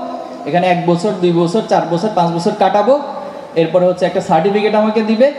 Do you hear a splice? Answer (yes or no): no